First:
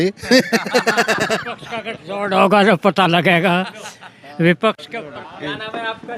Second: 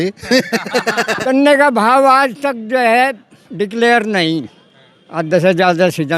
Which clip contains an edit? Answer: second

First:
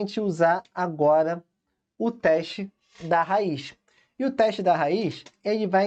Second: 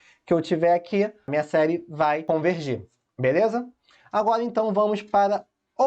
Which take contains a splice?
second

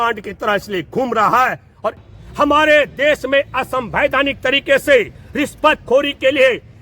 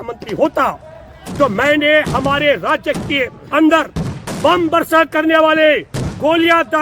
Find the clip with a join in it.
first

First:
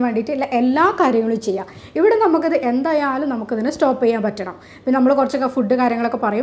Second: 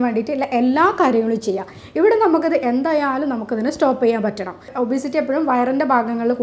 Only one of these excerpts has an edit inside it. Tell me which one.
second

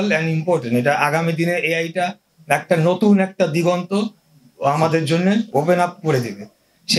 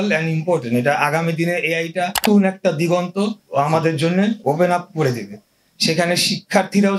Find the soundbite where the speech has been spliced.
second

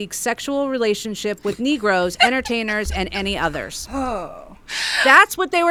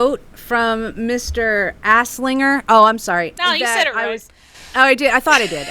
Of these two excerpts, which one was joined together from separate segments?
second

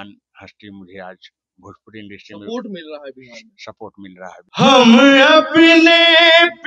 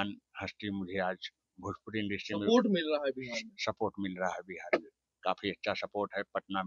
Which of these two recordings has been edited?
first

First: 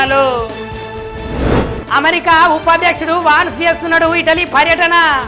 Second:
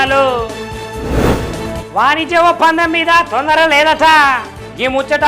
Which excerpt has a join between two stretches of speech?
first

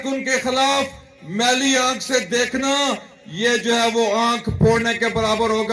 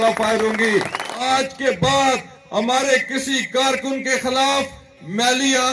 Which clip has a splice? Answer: second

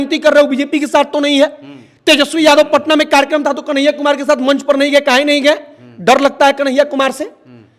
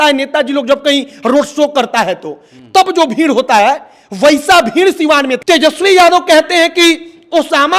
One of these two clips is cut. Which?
second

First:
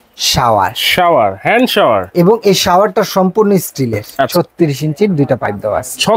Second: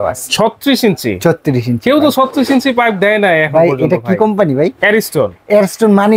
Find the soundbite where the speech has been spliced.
first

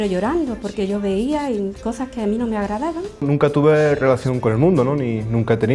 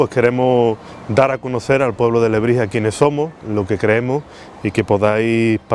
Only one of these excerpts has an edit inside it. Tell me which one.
first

